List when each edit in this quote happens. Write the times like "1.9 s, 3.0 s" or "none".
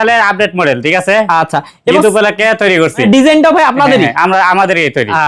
3.0 s